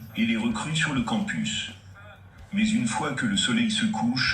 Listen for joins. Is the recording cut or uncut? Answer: cut